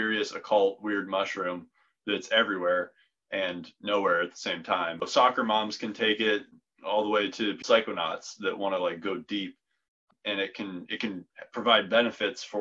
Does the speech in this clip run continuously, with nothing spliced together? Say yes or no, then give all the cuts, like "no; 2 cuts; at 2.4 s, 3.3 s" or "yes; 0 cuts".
no; 4 cuts; at 5.1 s, 6.5 s, 7.6 s, 10.0 s